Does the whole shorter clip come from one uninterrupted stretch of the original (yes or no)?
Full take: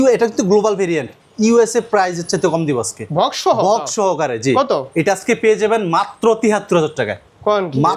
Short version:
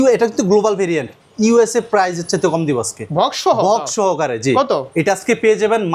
yes